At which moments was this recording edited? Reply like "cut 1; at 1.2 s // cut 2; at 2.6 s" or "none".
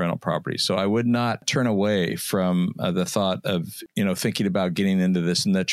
cut 1; at 1.5 s // cut 2; at 3.8 s

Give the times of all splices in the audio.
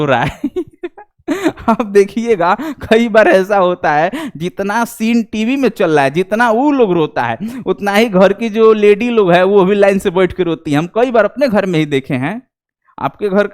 none

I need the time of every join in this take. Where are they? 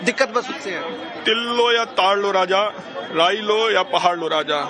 cut 1; at 3.5 s

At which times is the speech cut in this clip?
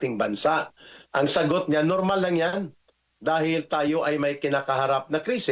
none

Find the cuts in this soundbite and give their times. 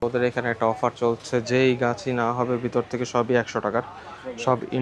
none

